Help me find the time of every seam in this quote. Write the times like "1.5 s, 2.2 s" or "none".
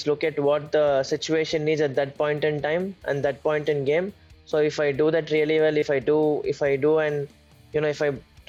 none